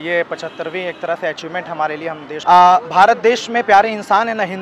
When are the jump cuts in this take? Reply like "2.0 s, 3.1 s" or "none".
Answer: 2.3 s